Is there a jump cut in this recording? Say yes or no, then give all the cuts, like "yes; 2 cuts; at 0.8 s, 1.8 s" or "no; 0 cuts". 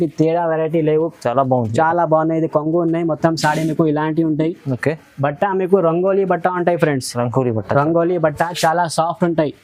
no; 0 cuts